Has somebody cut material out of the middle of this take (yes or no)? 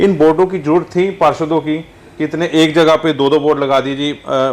no